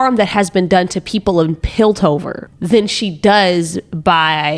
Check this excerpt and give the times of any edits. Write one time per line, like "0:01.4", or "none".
none